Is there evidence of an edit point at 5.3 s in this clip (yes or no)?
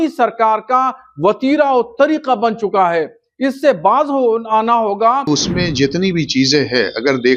yes